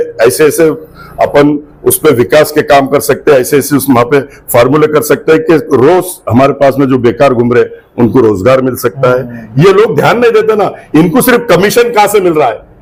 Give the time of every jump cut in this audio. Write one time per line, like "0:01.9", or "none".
none